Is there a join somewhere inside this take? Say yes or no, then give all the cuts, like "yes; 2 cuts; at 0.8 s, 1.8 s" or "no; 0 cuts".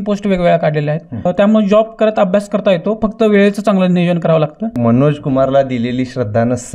yes; 2 cuts; at 1.1 s, 4.8 s